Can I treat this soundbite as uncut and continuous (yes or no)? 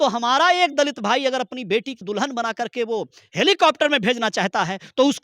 no